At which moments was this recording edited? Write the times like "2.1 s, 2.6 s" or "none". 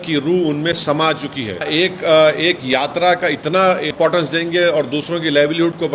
1.7 s, 3.9 s